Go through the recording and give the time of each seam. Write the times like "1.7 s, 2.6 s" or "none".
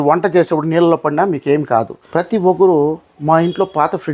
2.0 s